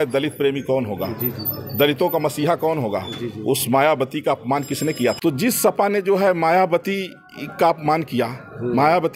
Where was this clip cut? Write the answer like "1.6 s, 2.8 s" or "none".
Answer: 5.2 s